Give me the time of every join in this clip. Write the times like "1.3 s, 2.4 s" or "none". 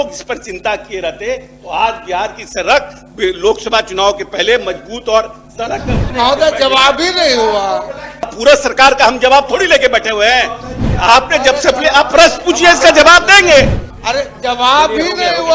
6.0 s, 8.3 s, 13.9 s